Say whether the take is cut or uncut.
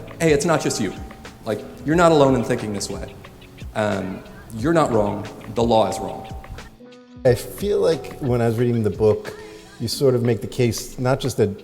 cut